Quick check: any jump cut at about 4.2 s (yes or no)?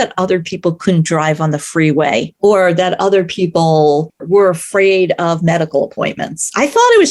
yes